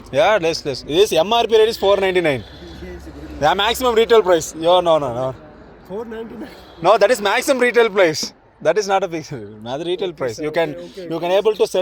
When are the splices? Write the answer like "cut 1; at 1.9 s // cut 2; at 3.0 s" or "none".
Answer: none